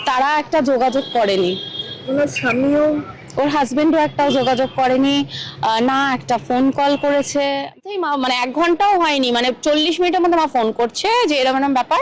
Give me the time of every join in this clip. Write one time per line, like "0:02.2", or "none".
0:07.8